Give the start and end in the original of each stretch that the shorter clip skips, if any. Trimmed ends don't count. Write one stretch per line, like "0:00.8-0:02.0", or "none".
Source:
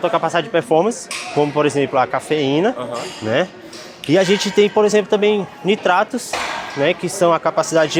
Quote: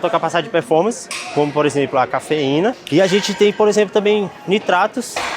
0:02.8-0:04.0